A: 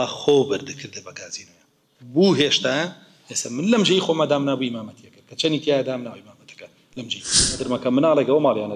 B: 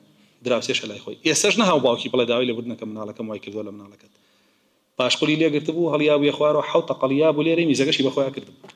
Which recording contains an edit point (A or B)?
A